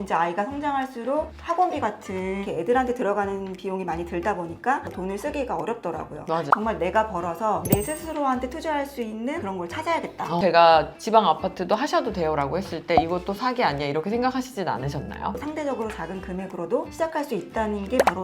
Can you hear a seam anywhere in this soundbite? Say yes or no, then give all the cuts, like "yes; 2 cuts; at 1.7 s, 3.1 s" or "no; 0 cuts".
yes; 4 cuts; at 4.9 s, 6.5 s, 10.4 s, 15.4 s